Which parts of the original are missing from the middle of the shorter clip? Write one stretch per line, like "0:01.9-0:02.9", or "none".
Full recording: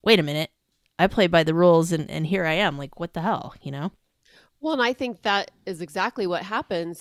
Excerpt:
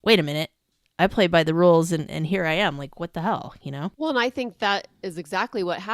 0:03.9-0:04.6